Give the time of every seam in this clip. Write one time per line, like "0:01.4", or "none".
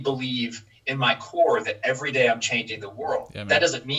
none